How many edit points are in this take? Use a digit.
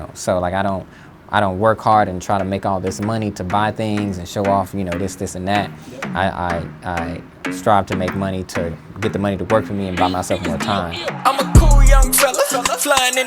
1